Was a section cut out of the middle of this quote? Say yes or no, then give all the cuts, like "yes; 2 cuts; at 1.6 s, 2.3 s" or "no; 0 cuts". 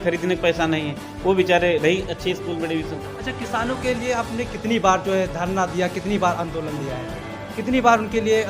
yes; 1 cut; at 2.9 s